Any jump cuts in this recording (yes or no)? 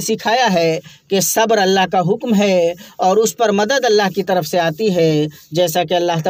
no